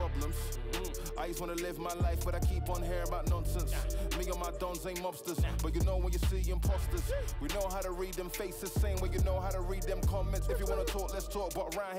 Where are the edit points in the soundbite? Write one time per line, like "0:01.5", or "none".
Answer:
none